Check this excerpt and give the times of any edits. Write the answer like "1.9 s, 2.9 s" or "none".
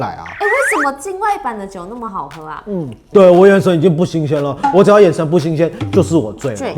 3.0 s